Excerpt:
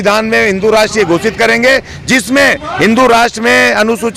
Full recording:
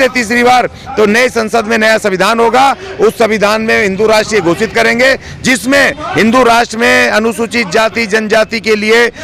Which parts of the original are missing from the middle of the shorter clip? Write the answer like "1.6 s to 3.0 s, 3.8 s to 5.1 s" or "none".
none